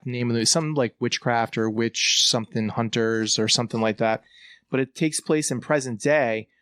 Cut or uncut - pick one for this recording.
uncut